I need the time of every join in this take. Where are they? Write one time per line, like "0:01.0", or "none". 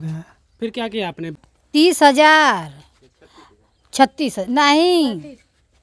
0:01.4